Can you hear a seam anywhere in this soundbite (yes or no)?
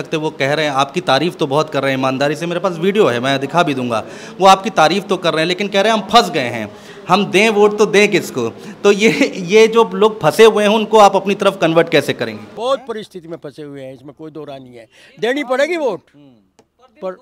no